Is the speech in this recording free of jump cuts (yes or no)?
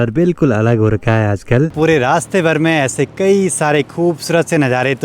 no